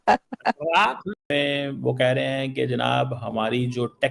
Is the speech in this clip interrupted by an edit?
yes; 1 cut; at 1.0 s

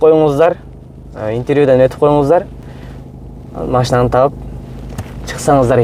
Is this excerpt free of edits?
yes; 0 cuts

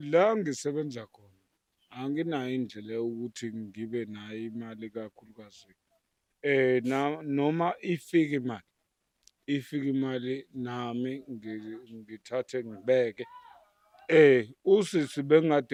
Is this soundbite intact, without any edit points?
yes; 0 cuts

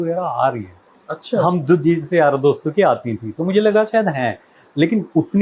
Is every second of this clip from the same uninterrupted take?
yes; 0 cuts

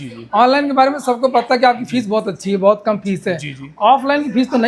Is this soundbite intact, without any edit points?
yes; 0 cuts

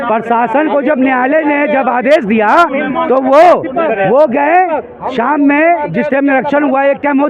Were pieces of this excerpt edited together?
no; 0 cuts

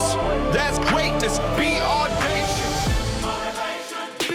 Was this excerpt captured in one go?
yes; 0 cuts

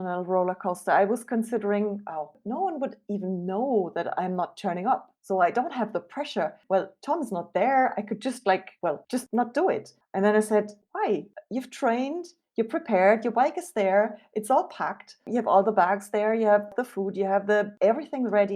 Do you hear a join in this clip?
yes; 4 cuts; at 2.4 s, 6.6 s, 9.0 s, 10.0 s

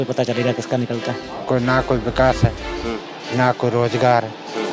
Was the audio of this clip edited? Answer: yes; 1 cut; at 1.3 s

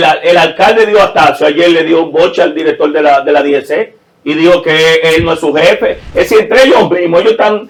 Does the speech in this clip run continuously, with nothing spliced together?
yes; 0 cuts

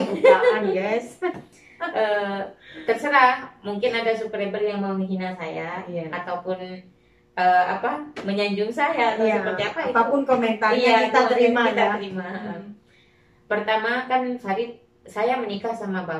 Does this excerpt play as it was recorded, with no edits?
yes; 0 cuts

